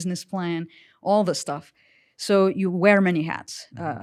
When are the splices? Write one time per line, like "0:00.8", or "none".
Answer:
none

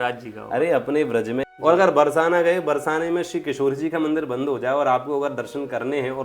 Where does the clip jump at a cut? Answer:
0:01.5

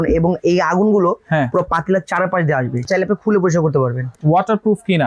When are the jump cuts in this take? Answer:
0:02.8
0:04.1

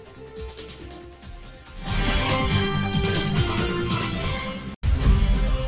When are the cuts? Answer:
0:04.7

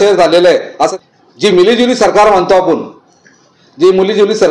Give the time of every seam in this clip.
0:00.9

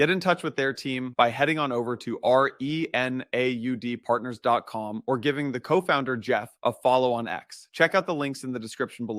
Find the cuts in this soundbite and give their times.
none

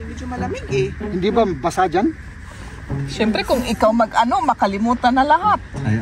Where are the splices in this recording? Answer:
0:03.1

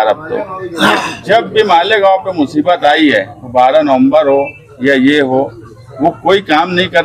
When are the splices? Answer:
none

